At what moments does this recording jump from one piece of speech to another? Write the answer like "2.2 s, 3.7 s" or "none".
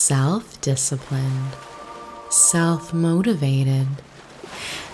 none